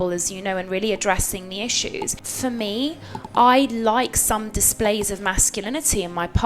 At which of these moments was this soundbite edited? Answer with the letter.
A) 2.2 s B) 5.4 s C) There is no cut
A